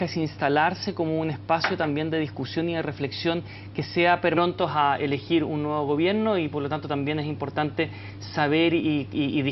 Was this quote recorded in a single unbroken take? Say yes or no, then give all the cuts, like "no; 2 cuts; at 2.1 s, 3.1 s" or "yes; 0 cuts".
yes; 0 cuts